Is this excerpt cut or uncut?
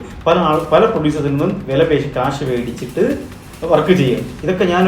uncut